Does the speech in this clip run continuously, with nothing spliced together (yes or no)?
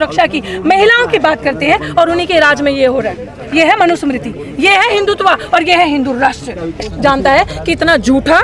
no